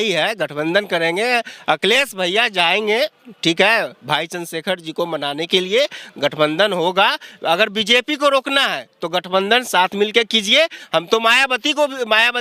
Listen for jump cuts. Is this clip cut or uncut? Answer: uncut